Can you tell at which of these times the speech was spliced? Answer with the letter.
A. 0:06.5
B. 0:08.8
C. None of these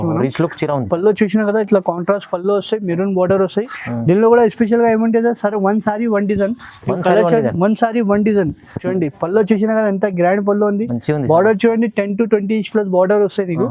B